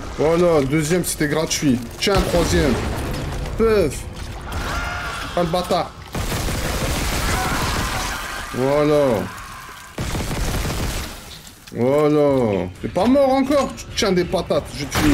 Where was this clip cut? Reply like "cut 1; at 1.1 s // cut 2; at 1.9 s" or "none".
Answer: cut 1; at 12.8 s